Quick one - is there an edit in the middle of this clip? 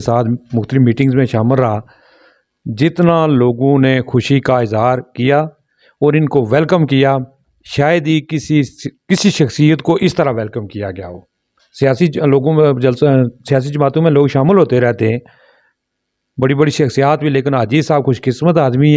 no; 0 cuts

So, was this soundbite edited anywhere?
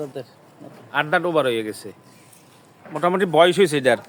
no; 0 cuts

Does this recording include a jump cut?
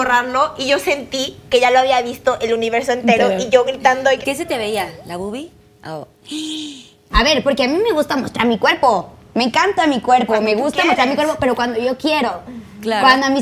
yes; 2 cuts; at 4.2 s, 7.2 s

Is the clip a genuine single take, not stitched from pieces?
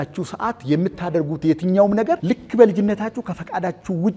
no; 1 cut; at 2.2 s

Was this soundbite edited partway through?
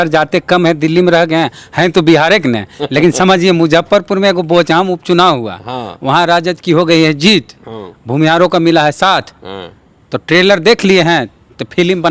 no; 0 cuts

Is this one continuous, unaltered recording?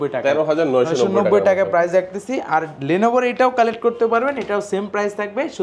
yes; 0 cuts

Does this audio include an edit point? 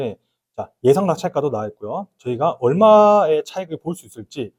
no; 0 cuts

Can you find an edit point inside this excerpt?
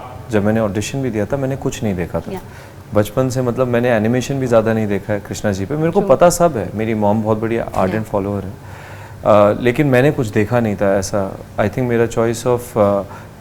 no; 0 cuts

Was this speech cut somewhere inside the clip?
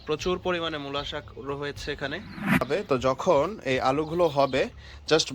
yes; 1 cut; at 2.7 s

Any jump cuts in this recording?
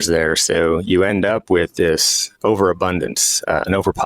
no; 0 cuts

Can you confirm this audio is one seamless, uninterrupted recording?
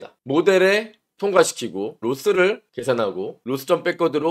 no; 2 cuts; at 2.0 s, 3.4 s

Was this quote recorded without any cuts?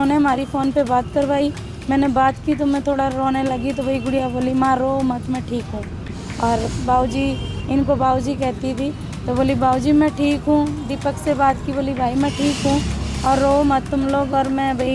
yes; 0 cuts

